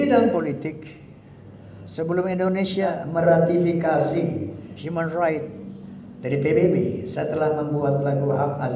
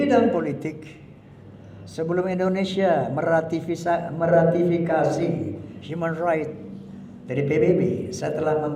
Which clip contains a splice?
first; 1 cut; at 2.9 s

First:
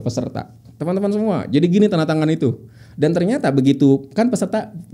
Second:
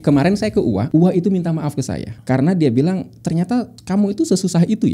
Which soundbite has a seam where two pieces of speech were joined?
second; 3 cuts; at 0.8 s, 2.1 s, 3.8 s

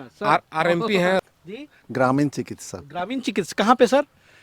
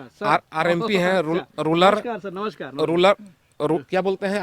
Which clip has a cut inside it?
first; 1 cut; at 1.2 s

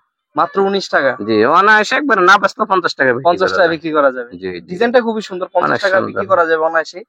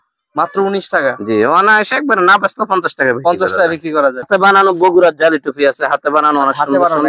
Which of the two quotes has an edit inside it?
second; 1 cut; at 4.3 s

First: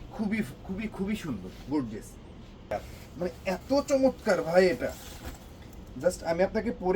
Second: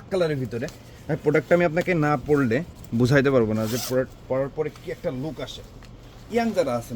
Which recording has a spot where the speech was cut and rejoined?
first; 1 cut; at 2.7 s

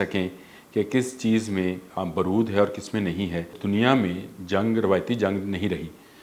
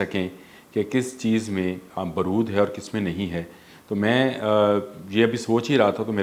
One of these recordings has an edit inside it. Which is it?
first; 1 cut; at 3.6 s

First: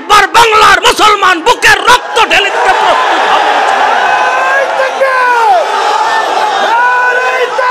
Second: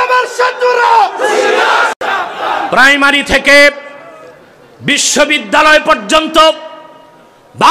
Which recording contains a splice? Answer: second; 1 cut; at 2.7 s

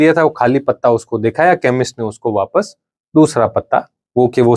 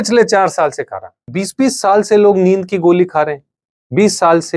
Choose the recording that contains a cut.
second; 1 cut; at 1.3 s

